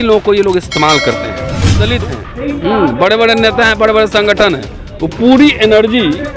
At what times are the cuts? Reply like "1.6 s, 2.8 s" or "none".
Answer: 1.9 s